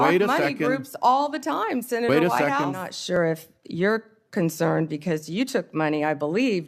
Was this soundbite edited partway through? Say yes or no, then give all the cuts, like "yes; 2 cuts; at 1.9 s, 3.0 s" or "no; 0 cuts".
yes; 1 cut; at 3.2 s